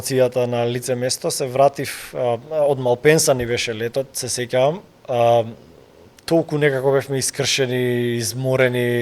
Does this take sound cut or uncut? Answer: uncut